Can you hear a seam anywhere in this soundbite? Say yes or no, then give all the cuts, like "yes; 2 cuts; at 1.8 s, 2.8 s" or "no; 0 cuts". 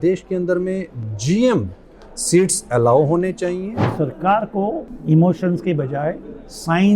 yes; 2 cuts; at 3.9 s, 4.9 s